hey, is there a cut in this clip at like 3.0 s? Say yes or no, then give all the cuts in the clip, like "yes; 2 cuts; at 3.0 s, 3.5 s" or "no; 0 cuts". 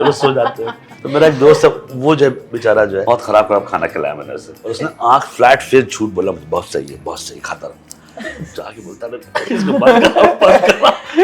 yes; 3 cuts; at 0.9 s, 3.0 s, 4.6 s